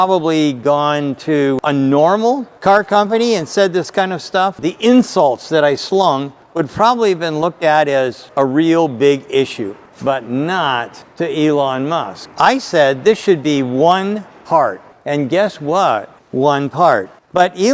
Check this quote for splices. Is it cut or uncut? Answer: cut